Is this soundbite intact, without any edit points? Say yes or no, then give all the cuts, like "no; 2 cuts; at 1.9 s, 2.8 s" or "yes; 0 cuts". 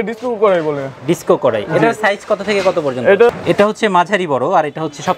no; 1 cut; at 3.3 s